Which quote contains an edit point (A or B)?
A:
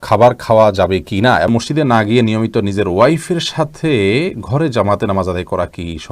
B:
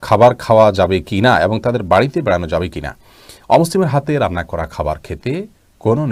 A